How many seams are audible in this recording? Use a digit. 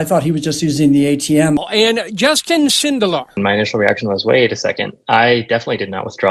0